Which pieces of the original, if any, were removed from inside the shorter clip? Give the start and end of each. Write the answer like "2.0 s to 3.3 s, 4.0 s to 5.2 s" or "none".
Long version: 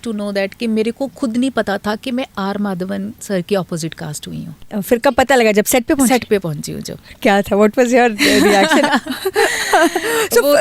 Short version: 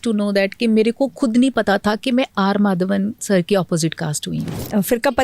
none